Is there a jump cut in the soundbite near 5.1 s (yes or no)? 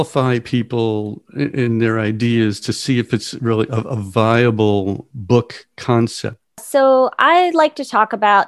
yes